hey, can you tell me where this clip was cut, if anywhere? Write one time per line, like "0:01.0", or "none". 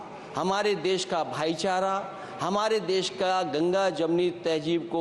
none